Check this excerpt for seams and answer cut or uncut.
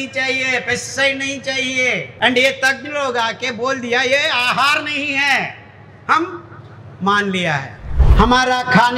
cut